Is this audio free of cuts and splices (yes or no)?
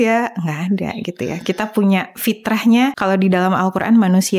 no